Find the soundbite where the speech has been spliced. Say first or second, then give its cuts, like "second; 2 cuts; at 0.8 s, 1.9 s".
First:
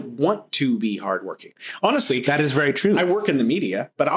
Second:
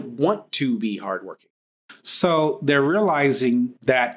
second; 1 cut; at 1.6 s